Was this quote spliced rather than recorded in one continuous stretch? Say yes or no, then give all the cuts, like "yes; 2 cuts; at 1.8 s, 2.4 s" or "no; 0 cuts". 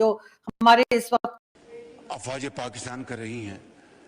yes; 1 cut; at 1.4 s